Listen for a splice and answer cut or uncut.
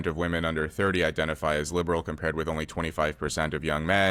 uncut